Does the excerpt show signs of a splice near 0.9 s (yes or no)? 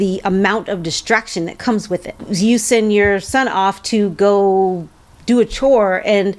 no